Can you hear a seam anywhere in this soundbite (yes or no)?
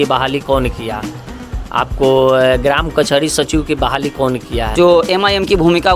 yes